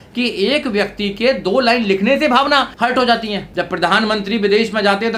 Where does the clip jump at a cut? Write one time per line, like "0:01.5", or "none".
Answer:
0:02.7
0:03.4